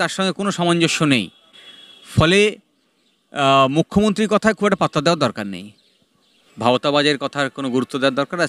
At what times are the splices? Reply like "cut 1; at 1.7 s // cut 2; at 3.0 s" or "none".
none